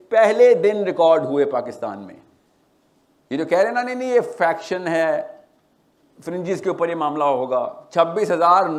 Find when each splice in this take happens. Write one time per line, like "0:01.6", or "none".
none